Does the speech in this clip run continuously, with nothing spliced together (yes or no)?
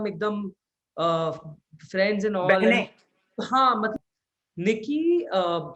no